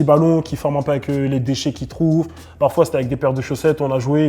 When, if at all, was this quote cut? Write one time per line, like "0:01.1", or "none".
none